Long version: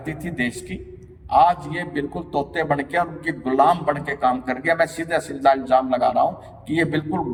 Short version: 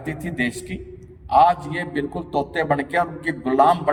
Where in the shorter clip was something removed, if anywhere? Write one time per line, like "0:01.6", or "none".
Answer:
none